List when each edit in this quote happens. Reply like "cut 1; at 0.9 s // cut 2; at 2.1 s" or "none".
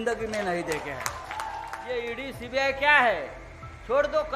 cut 1; at 1.7 s